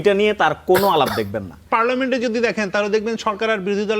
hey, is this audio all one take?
no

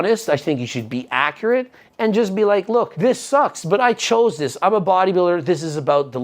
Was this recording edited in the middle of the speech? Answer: yes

